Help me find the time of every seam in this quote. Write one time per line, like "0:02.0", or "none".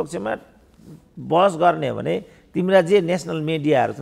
none